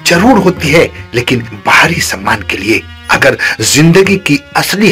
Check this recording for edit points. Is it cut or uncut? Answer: uncut